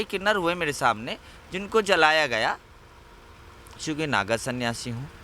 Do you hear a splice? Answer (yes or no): yes